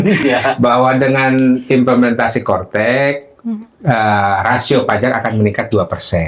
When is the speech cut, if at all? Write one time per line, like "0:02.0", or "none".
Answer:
none